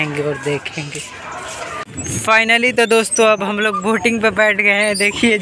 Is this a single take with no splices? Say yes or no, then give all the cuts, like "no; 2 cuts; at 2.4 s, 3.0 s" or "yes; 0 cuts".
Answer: no; 1 cut; at 1.9 s